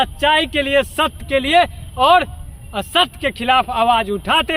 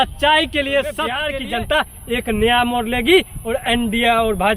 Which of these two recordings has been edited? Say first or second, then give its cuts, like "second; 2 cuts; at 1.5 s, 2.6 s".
second; 1 cut; at 1.3 s